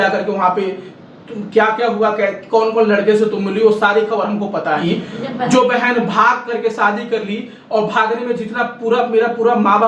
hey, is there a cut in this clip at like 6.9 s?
no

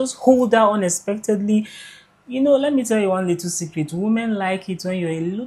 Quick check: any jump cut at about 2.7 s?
no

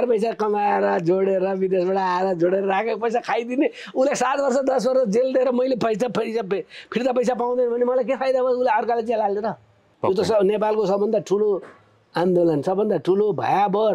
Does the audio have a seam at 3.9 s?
no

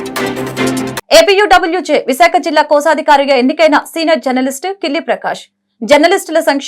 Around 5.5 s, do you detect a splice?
no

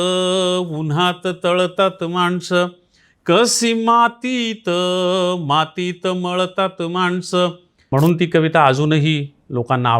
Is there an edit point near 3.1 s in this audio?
no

